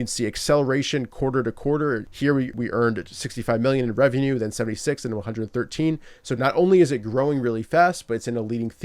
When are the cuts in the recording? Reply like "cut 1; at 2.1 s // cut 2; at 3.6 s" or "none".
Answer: cut 1; at 2.3 s

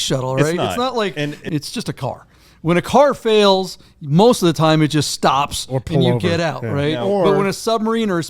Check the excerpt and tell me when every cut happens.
cut 1; at 1.4 s

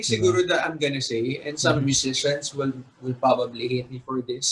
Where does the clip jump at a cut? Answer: none

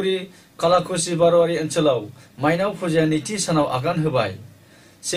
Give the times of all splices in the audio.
none

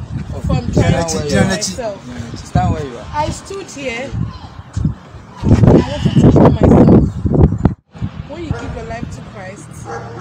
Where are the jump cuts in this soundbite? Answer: cut 1; at 7.8 s

